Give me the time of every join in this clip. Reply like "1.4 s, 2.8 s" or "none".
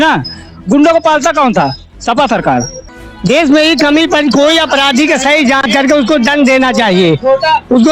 2.8 s